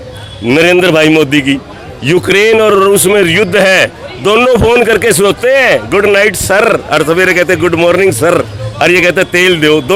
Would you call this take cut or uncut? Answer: uncut